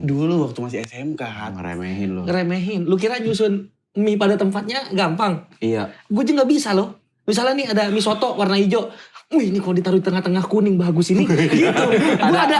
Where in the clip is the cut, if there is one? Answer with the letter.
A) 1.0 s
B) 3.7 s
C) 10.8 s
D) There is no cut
D